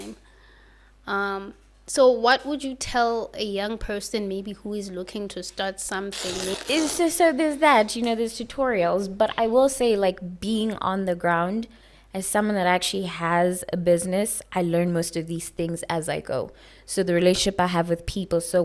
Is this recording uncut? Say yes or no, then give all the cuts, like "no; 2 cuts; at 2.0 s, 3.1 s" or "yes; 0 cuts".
no; 1 cut; at 6.6 s